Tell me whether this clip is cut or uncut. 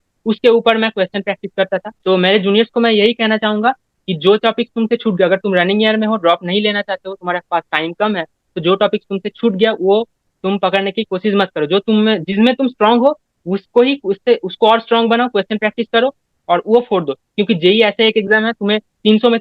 uncut